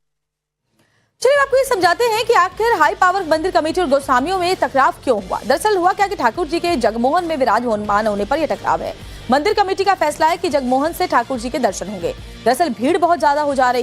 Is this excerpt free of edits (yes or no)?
no